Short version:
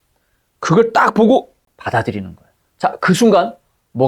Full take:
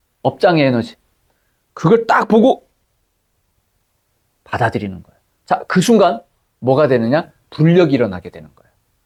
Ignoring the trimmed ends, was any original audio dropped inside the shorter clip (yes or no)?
yes